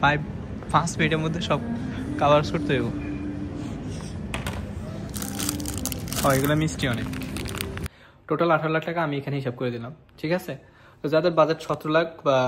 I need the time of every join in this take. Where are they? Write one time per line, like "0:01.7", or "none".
0:07.9